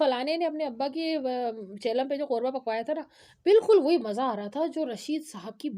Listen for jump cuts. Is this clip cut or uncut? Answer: uncut